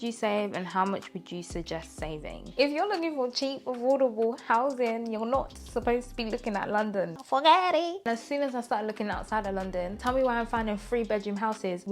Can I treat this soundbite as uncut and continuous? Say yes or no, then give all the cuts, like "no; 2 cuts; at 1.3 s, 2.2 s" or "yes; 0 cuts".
no; 2 cuts; at 2.5 s, 8.1 s